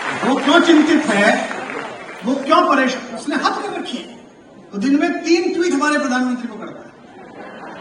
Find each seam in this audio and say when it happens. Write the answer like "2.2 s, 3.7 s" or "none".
none